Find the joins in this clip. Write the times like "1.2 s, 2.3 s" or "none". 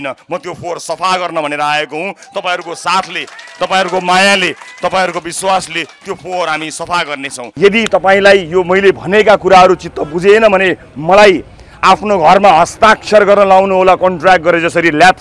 7.4 s